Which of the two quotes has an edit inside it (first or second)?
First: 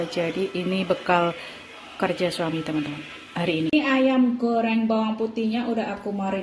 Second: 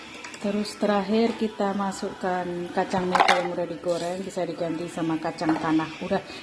first